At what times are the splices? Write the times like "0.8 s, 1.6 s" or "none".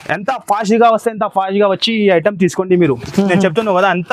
none